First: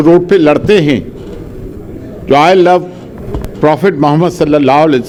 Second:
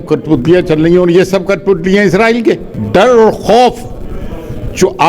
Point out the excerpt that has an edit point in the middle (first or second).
second